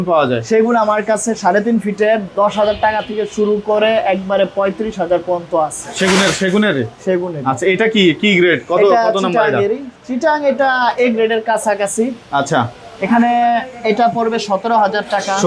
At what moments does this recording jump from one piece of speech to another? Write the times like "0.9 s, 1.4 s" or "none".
none